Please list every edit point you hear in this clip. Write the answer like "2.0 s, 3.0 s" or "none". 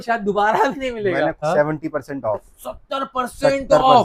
1.4 s